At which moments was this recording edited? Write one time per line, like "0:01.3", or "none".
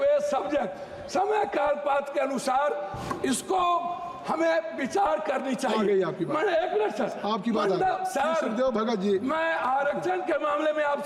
none

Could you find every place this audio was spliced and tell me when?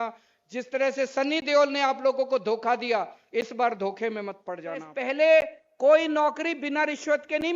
0:04.9

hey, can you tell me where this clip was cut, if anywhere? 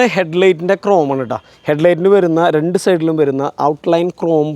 none

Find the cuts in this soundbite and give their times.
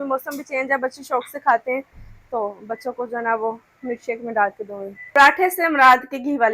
0:05.1

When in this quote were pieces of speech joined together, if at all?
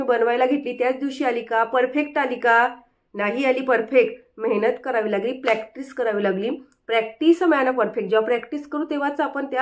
none

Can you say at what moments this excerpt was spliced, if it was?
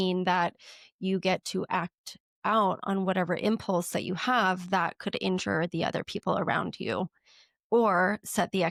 none

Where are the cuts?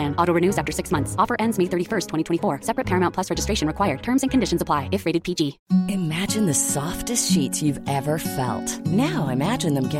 0:05.6

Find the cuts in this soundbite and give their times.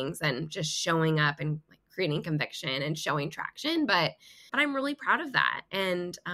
0:04.5

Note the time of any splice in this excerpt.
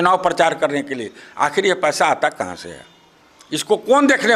none

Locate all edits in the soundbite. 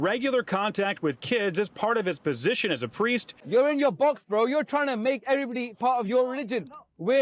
0:03.3

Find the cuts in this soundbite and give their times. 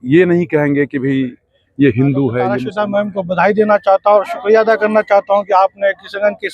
0:02.6

